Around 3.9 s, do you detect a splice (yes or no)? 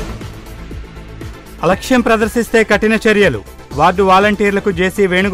no